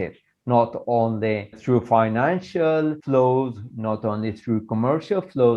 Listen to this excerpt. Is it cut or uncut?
cut